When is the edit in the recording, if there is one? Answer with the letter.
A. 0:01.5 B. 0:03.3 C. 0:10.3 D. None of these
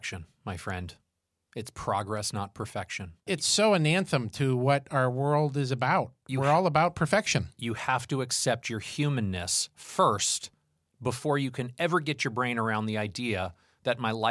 B